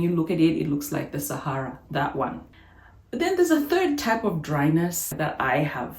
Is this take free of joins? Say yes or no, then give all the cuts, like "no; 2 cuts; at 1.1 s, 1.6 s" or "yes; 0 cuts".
no; 2 cuts; at 2.6 s, 5.1 s